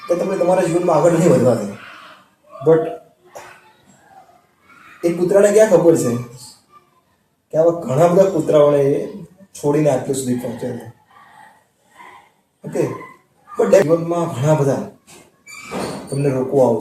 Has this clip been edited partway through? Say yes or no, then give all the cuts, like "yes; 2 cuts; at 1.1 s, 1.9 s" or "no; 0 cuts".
yes; 1 cut; at 13.8 s